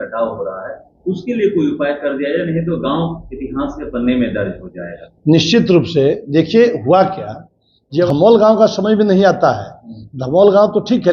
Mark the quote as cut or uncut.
cut